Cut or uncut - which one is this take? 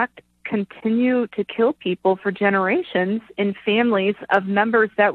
uncut